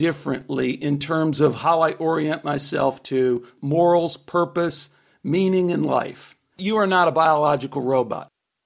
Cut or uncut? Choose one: cut